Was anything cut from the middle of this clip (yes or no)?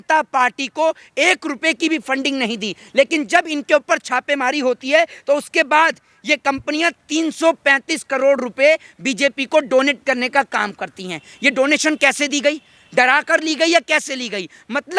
no